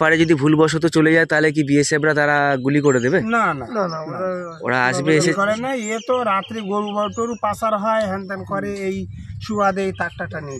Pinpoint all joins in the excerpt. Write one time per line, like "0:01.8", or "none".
none